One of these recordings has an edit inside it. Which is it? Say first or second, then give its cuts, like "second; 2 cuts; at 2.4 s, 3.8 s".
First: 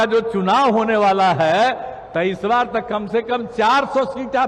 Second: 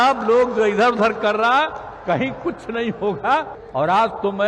second; 1 cut; at 3.6 s